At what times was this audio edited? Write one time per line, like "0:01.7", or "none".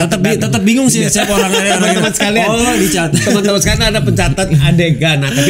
none